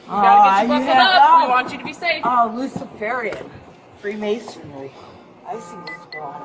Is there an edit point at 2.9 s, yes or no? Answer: no